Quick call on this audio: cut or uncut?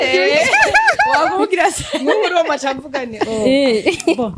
uncut